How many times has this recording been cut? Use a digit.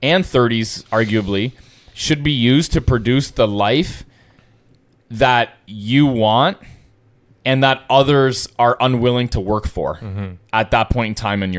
0